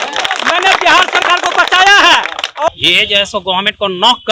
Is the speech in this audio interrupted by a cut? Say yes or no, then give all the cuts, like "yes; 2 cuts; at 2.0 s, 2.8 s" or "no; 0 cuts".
yes; 1 cut; at 2.7 s